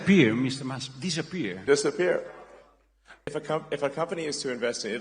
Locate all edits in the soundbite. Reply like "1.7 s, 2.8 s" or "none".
3.3 s